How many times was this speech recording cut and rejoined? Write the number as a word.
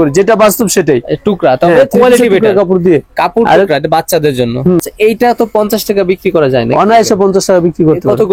zero